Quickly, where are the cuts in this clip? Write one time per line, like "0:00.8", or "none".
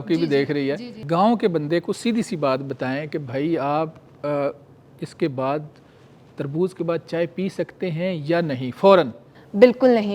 0:01.0